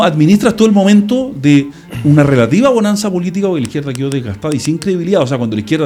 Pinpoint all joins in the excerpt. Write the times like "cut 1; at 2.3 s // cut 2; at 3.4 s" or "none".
none